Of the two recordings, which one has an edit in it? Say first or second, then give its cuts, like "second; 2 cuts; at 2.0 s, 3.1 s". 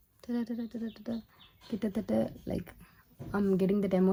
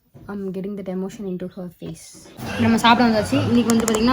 second; 1 cut; at 2.3 s